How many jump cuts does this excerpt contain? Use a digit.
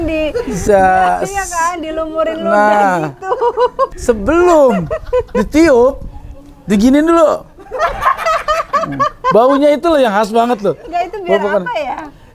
1